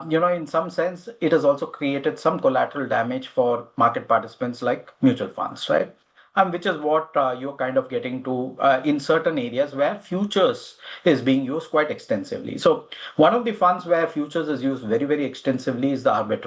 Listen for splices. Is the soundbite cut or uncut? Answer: uncut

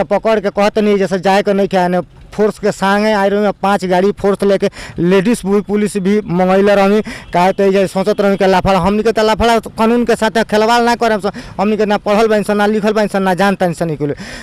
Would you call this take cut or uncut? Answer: uncut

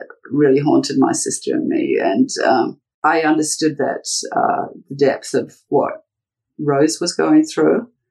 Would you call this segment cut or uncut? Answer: cut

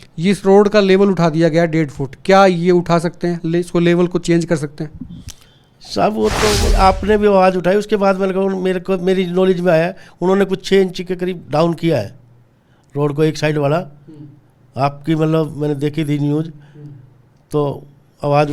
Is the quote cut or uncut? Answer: cut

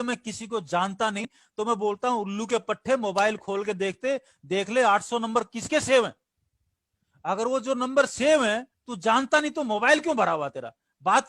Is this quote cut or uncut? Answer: cut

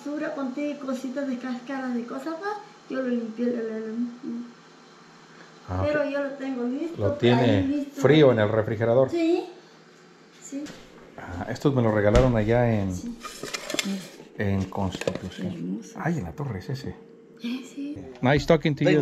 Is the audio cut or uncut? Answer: cut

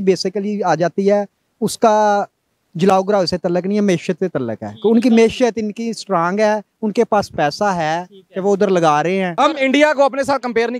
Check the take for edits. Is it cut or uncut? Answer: cut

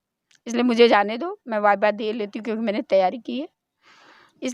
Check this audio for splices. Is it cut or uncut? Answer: uncut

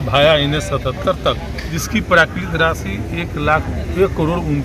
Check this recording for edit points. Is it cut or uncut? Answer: cut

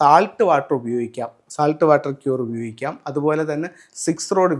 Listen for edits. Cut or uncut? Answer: uncut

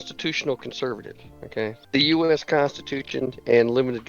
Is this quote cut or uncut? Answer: cut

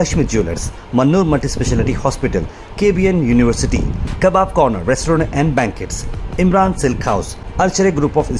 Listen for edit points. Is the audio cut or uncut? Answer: uncut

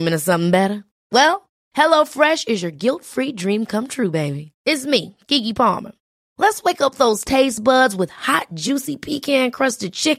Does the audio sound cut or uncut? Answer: uncut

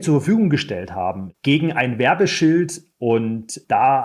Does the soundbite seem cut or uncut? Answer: cut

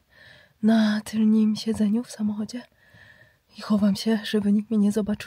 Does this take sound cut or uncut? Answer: uncut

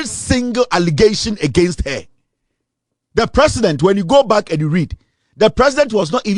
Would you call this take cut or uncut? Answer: uncut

